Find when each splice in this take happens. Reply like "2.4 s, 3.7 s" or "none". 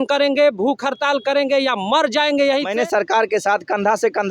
2.7 s